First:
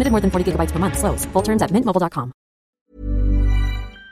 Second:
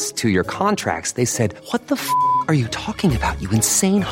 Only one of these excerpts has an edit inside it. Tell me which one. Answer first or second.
first